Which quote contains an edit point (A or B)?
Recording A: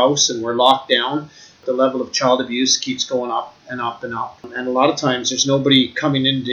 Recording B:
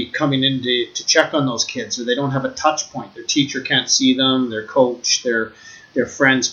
A